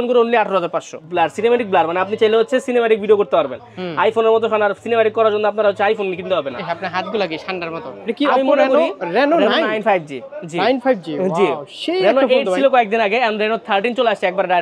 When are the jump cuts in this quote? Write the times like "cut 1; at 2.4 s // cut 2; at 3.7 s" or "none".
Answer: cut 1; at 1.0 s // cut 2; at 8.0 s

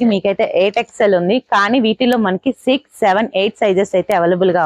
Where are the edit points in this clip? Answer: none

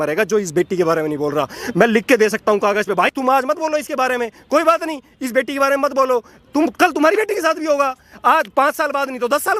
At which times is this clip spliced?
none

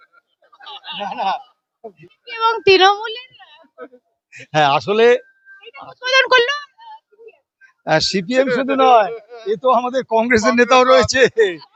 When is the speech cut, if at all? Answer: none

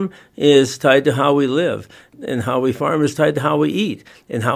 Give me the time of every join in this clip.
none

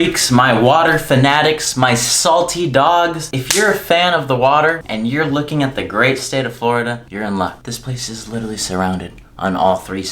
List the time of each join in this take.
cut 1; at 3.3 s // cut 2; at 4.9 s // cut 3; at 7.1 s // cut 4; at 7.7 s

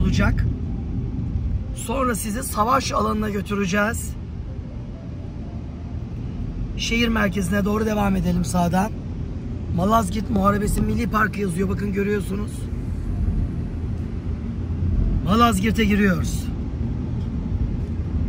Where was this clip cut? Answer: none

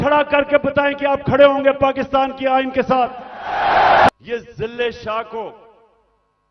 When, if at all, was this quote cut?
cut 1; at 4.1 s

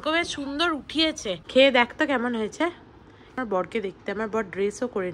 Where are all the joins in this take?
cut 1; at 1.4 s // cut 2; at 3.4 s

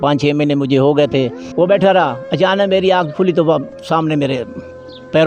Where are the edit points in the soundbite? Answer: cut 1; at 1.4 s

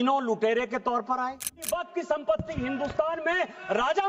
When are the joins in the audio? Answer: cut 1; at 1.6 s

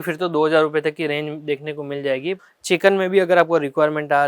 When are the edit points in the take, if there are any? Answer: cut 1; at 2.3 s

